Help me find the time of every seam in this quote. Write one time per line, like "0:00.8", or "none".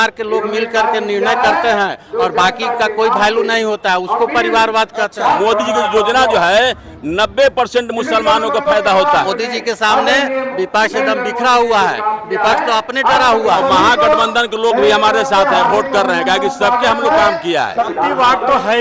0:05.4
0:09.3
0:13.6
0:17.9